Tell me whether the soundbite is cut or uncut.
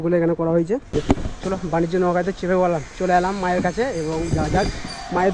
cut